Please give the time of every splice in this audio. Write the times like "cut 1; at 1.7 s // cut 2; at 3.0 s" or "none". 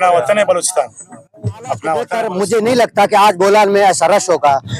cut 1; at 2.1 s